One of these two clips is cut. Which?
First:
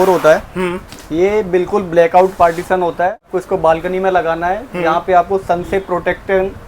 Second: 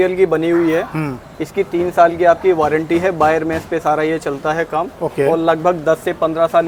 first; 1 cut; at 3.3 s

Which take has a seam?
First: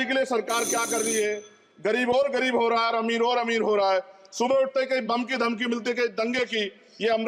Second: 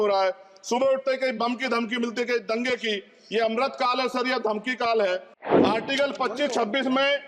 second; 1 cut; at 5.4 s

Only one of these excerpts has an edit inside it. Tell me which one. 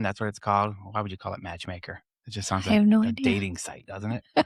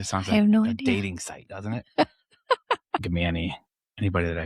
second; 1 cut; at 3.0 s

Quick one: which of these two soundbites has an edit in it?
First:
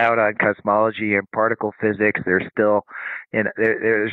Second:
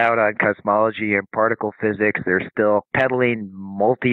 second; 1 cut; at 2.9 s

